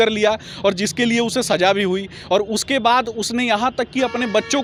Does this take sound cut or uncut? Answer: uncut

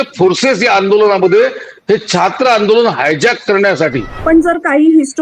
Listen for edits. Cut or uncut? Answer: cut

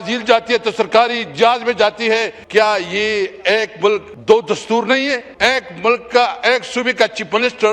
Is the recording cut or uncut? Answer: cut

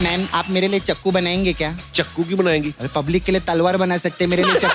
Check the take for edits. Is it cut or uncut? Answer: uncut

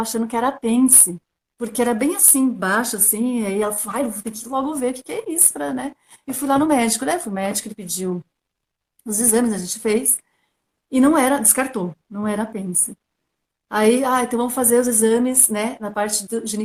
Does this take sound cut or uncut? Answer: uncut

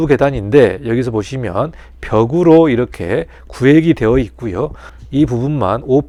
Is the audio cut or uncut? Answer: uncut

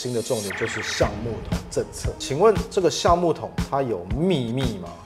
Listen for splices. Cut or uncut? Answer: uncut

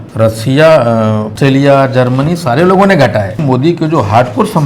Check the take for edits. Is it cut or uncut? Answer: cut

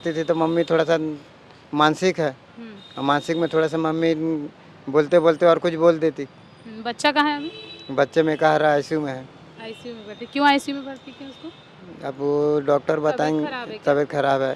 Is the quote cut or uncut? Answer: uncut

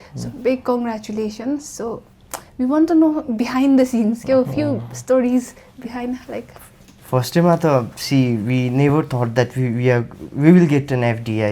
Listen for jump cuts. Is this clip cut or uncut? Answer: uncut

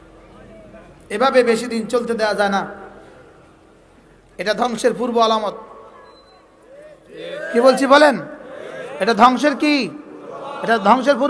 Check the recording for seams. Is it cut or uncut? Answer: uncut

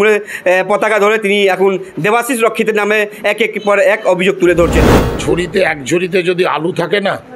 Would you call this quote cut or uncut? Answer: cut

